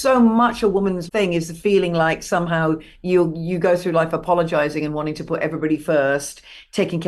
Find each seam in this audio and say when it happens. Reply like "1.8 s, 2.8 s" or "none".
1.0 s